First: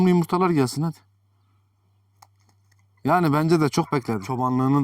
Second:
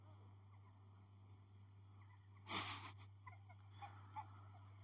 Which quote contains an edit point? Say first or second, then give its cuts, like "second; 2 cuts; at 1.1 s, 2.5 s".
first; 1 cut; at 3.9 s